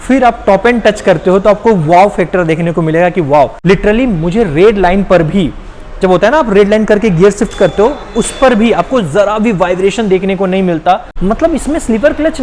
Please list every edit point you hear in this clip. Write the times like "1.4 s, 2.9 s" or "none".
3.6 s, 11.1 s